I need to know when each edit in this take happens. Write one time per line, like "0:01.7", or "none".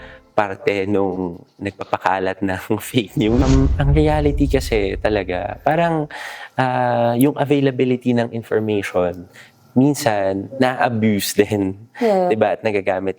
0:03.4